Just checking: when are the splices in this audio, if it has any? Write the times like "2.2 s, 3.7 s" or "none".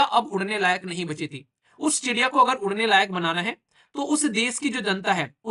none